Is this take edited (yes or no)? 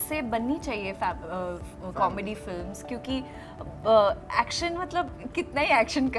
no